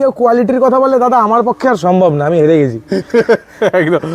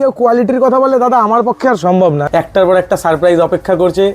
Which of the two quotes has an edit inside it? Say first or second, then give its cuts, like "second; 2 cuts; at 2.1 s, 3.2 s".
second; 1 cut; at 2.3 s